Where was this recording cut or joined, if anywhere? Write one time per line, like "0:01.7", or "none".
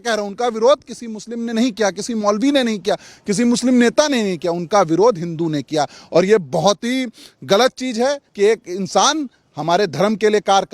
0:08.2